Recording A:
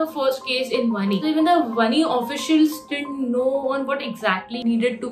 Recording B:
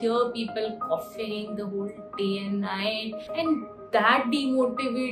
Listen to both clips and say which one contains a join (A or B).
B